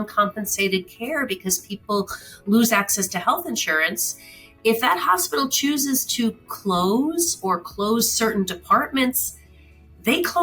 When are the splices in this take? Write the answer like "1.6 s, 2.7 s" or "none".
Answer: none